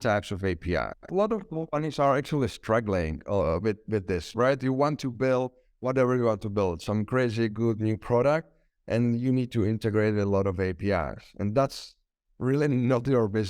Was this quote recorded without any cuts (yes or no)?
no